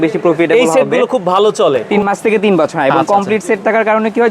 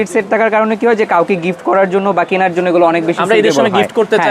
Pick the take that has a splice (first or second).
first